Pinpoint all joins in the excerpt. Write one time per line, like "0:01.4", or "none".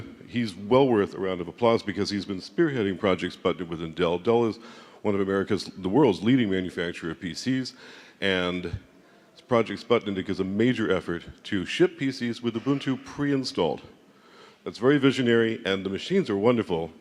none